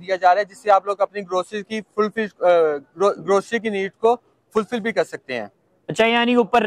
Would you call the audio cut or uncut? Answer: uncut